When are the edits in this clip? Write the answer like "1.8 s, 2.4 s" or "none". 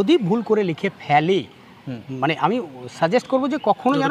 none